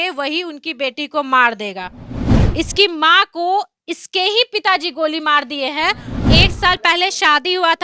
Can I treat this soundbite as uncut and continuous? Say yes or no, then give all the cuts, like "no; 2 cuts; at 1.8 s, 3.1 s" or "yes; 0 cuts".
no; 2 cuts; at 2.2 s, 6.1 s